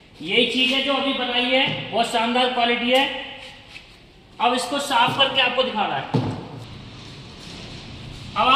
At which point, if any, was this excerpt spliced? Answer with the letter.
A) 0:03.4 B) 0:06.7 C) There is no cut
B